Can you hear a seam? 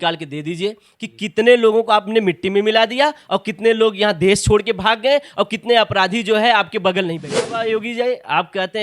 yes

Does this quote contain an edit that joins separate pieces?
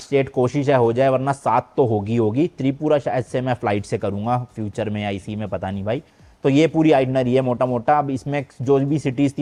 no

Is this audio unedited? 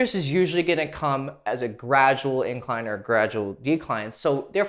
yes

